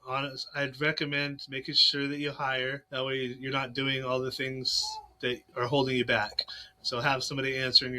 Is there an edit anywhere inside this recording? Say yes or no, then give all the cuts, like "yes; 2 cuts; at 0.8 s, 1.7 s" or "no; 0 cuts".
yes; 2 cuts; at 2.8 s, 5.5 s